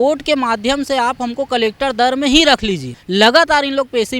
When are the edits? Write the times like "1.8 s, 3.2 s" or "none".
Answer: 2.9 s